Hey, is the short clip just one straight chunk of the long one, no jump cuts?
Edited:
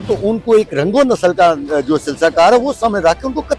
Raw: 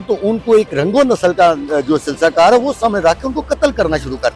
yes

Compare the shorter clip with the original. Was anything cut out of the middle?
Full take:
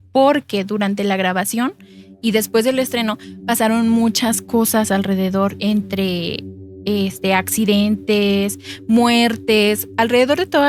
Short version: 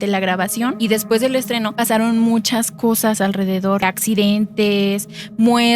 yes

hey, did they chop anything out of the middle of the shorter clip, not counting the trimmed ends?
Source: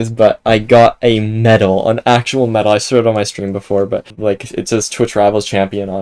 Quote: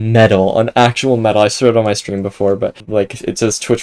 no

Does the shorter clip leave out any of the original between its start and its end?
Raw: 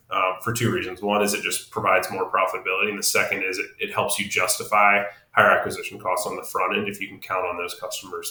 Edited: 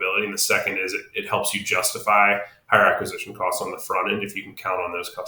no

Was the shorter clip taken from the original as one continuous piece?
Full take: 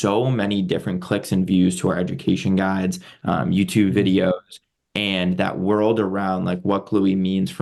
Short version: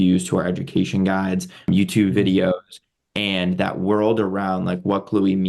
no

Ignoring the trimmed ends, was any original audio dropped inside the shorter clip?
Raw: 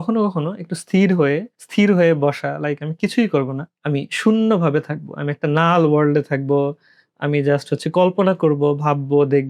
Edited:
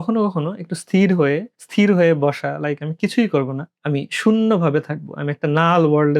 no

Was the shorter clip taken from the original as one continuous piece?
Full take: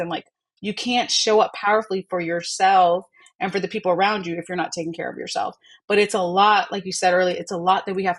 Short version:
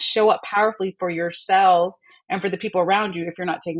yes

